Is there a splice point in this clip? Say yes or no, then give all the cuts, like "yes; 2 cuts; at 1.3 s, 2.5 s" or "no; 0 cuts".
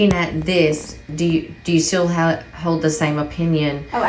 no; 0 cuts